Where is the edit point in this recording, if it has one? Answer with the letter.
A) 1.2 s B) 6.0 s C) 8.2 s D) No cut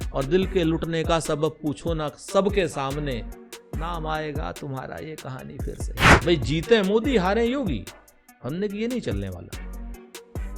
B